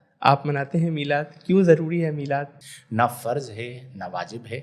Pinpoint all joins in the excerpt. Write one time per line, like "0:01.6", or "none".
0:02.6